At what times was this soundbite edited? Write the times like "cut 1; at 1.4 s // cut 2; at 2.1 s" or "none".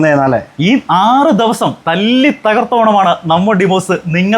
cut 1; at 1.8 s